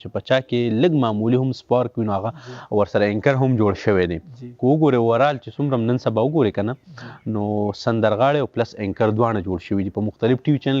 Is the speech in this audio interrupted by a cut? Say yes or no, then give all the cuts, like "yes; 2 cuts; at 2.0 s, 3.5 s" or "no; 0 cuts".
no; 0 cuts